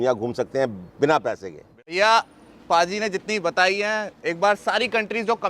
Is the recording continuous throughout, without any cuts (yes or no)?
no